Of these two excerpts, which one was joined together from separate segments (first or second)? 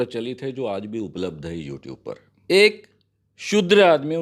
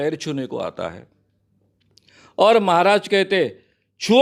first